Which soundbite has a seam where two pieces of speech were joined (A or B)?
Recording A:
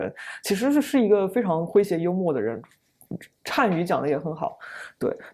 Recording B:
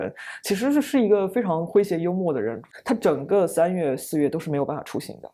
B